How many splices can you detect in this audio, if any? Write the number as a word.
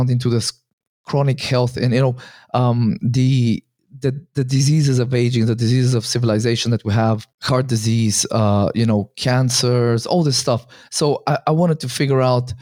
one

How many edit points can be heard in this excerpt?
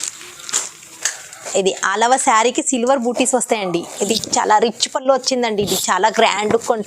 one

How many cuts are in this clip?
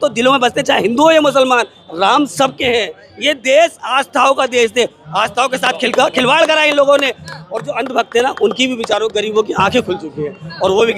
zero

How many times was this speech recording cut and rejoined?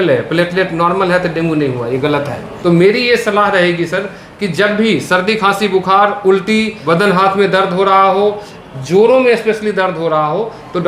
two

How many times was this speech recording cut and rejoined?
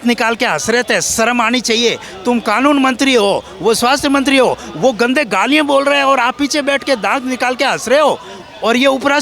zero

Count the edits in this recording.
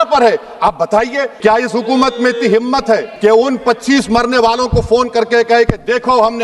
two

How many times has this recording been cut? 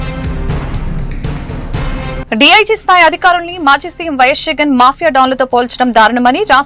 one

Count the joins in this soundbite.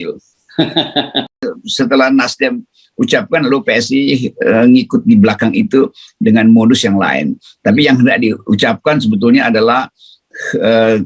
one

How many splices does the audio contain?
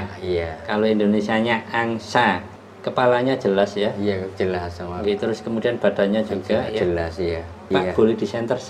one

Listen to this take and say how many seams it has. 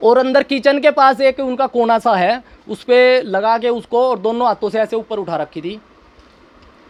zero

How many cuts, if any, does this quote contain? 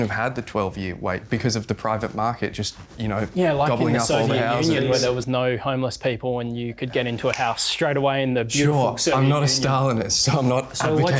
one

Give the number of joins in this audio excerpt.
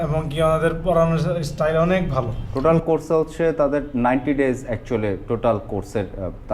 one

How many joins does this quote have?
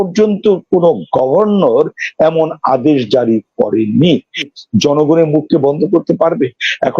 one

